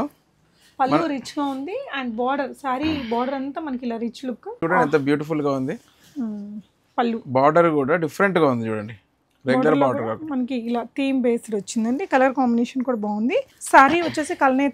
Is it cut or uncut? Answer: cut